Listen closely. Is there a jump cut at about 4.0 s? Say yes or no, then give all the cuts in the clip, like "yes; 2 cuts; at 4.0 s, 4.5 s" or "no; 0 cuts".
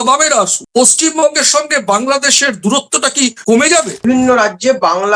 yes; 1 cut; at 4.0 s